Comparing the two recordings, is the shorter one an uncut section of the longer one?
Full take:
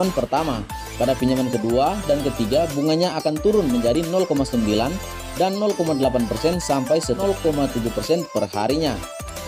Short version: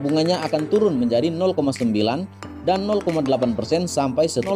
yes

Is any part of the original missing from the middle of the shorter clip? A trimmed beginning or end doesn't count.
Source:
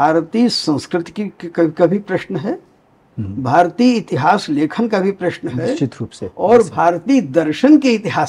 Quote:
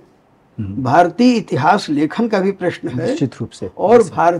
no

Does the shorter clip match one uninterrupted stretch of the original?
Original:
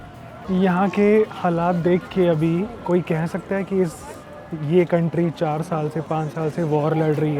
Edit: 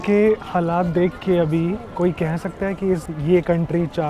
no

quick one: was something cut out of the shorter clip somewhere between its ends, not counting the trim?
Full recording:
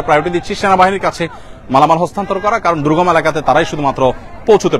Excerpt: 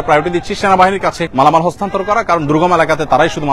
yes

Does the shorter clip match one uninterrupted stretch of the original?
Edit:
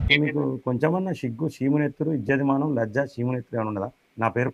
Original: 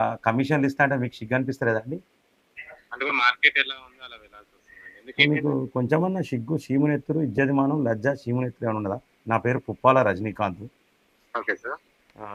yes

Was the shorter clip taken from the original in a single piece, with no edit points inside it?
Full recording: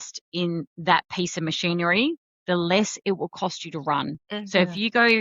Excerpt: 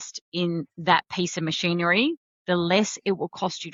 yes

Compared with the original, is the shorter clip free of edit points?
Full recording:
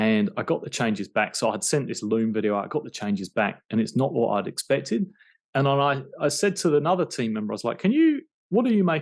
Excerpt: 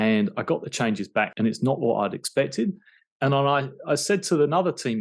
no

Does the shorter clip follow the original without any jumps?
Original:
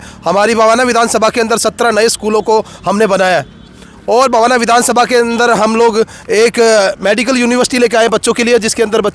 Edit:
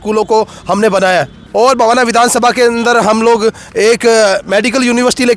no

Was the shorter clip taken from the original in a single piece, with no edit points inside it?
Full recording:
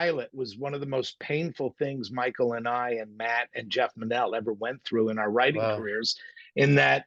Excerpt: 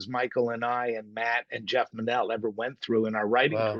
yes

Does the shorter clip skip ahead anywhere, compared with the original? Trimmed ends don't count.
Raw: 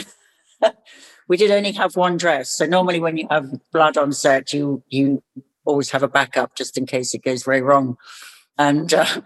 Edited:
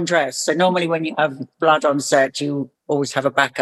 yes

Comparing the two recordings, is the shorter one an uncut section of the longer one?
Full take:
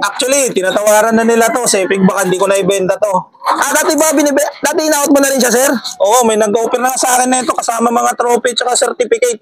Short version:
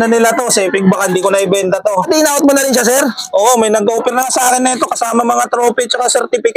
no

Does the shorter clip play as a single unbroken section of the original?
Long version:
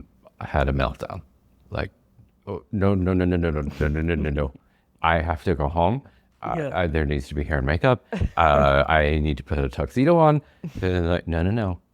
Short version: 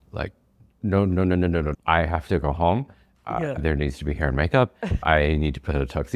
no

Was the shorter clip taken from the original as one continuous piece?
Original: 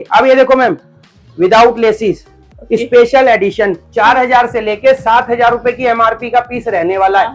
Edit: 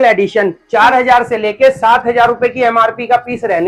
yes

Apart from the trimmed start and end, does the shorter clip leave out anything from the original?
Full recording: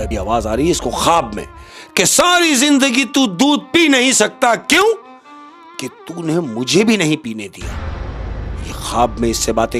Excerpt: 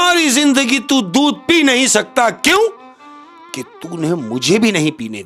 no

